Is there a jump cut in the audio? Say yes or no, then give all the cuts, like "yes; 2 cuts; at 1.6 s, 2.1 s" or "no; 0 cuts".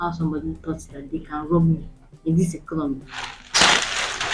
no; 0 cuts